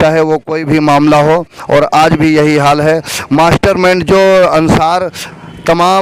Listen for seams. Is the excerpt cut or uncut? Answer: uncut